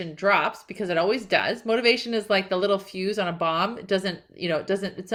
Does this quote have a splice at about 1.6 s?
no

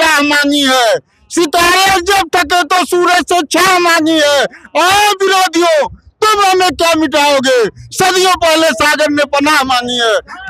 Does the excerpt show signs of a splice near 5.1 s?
no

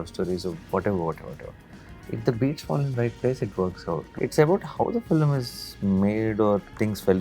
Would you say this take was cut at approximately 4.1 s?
yes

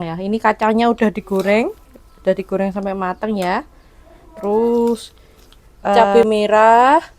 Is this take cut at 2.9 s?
no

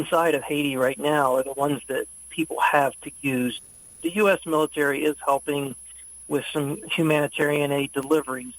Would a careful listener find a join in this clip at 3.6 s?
yes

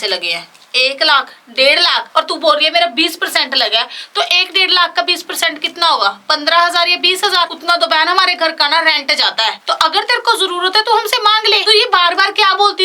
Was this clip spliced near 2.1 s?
no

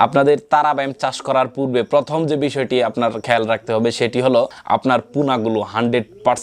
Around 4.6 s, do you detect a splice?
yes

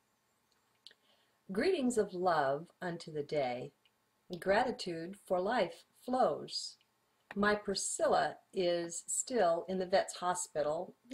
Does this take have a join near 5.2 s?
yes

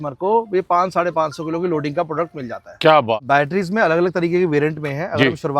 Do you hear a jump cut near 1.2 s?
no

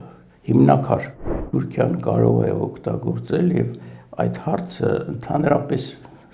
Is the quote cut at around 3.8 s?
no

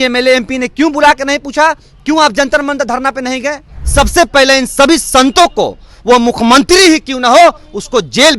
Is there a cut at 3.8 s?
yes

